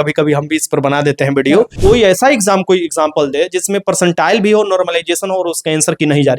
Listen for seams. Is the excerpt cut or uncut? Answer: cut